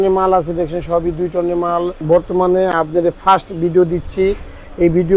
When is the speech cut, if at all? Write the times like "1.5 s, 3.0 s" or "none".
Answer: 2.0 s